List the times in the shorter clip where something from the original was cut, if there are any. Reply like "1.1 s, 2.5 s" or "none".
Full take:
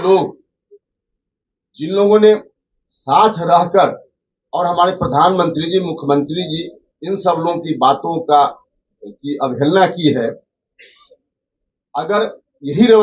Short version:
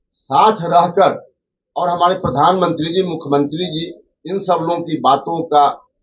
none

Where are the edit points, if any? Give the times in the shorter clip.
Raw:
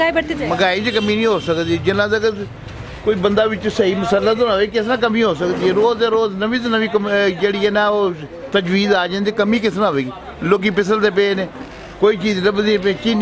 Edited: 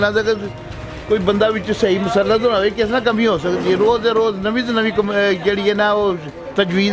none

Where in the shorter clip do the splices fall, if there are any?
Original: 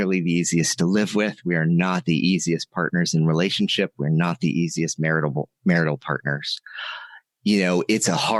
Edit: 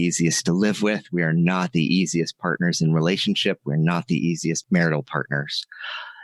4.6 s

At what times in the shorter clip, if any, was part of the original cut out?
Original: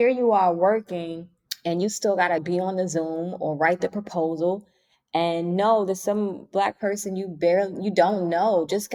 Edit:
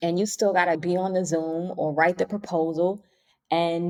none

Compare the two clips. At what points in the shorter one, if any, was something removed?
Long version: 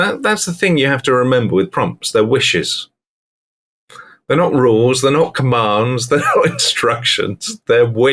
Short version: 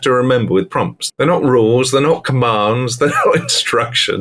1.0 s

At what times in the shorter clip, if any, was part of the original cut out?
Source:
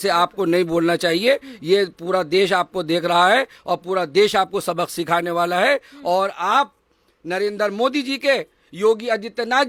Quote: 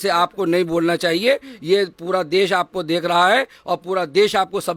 none

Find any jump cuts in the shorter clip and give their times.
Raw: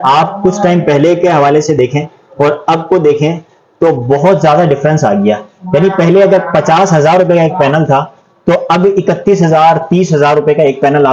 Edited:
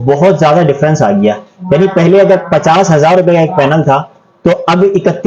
none

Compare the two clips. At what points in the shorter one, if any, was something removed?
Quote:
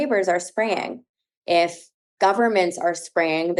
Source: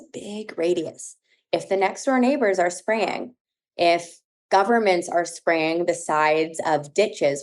none

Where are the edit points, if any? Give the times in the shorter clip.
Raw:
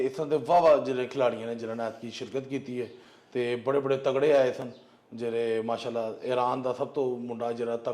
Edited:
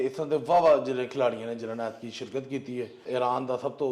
3.0 s

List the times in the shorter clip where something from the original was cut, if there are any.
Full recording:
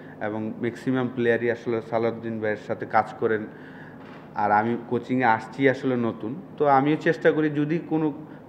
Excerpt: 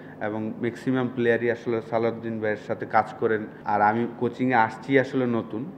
3.5 s

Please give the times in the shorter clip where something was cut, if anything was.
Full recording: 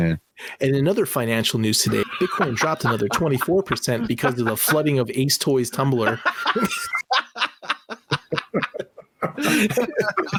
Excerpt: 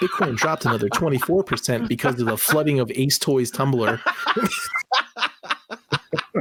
none

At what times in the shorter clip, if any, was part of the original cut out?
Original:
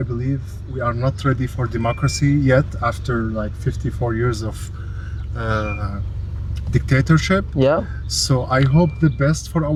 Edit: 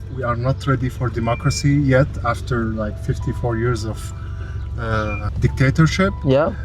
5.3 s

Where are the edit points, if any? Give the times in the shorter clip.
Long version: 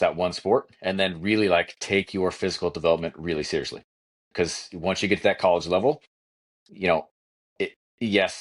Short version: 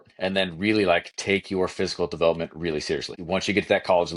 3.1 s

